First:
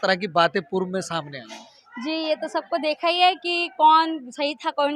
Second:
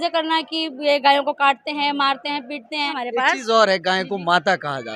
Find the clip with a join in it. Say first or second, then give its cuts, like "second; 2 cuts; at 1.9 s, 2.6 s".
second; 1 cut; at 2.9 s